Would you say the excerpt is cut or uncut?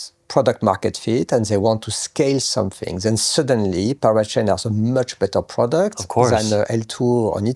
uncut